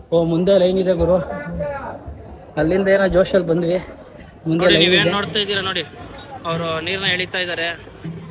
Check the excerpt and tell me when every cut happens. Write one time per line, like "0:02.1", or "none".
0:05.1